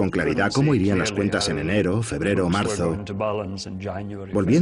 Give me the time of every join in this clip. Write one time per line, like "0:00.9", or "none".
0:00.9